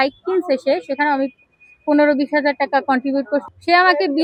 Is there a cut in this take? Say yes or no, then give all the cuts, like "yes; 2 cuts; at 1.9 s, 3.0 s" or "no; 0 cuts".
no; 0 cuts